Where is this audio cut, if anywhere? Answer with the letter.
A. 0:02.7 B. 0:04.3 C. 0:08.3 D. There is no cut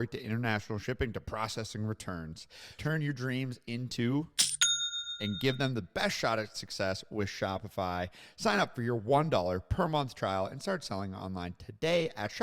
A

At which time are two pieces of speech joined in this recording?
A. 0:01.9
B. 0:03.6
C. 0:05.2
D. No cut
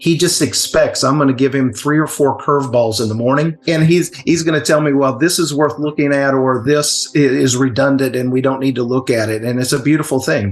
B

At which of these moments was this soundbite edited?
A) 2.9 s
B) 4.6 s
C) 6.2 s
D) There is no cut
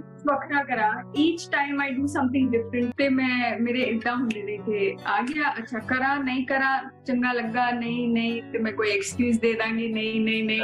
A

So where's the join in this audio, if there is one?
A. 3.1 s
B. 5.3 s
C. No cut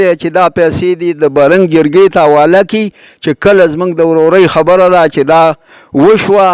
C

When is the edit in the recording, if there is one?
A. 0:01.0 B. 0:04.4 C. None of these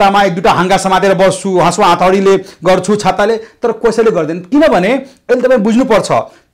C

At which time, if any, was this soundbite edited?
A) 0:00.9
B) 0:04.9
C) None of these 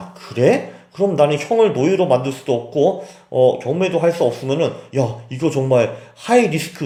C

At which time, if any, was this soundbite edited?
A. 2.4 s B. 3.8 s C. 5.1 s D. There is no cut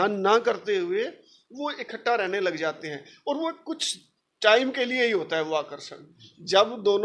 D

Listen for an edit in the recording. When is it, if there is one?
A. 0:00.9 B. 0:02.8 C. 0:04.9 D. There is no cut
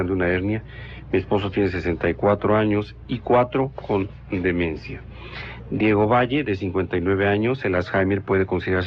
B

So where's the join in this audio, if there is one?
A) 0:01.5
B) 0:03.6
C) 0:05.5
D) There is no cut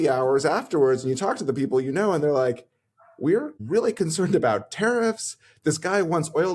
B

